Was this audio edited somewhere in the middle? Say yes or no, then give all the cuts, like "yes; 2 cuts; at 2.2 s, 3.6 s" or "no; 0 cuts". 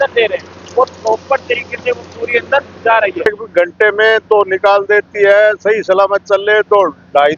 yes; 1 cut; at 3.3 s